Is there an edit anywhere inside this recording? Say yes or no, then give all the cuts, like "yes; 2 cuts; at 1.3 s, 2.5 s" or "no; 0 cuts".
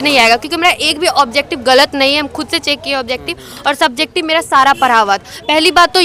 no; 0 cuts